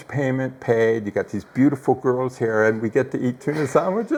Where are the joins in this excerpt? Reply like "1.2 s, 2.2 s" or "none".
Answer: none